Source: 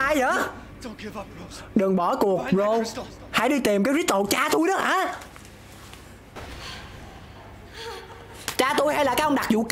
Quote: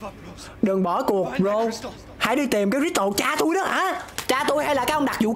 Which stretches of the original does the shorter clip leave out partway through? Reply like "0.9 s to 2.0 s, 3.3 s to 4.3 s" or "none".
5.2 s to 8.4 s